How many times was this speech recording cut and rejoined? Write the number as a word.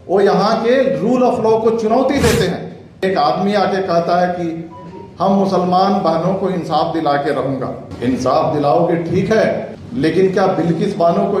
three